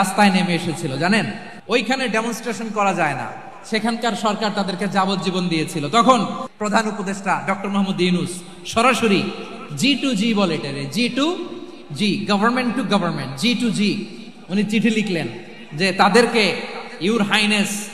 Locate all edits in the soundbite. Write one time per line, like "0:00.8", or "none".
0:01.5
0:06.5